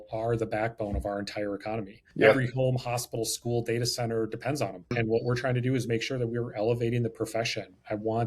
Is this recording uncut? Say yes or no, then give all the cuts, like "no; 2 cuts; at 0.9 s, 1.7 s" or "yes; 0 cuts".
no; 2 cuts; at 2.0 s, 4.9 s